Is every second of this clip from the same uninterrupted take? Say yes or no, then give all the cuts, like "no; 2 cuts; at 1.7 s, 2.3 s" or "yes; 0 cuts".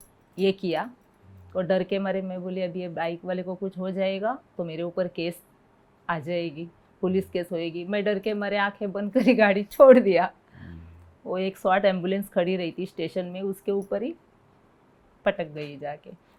yes; 0 cuts